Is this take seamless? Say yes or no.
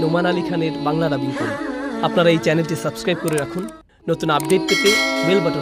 yes